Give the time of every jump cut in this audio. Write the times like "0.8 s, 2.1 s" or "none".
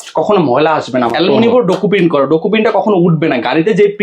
1.1 s